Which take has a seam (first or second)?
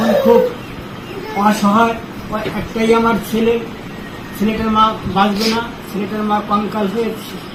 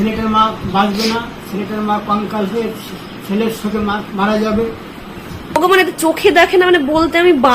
second